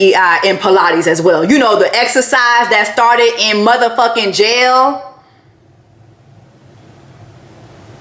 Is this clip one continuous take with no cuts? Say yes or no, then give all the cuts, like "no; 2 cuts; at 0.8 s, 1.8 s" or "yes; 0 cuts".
yes; 0 cuts